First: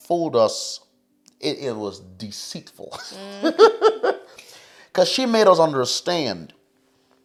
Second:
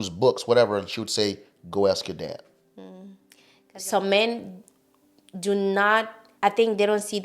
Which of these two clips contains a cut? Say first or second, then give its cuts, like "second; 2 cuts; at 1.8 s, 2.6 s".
second; 2 cuts; at 3.7 s, 6.2 s